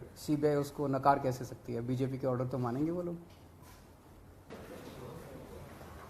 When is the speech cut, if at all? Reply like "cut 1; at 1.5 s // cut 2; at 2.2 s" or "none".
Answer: cut 1; at 4.5 s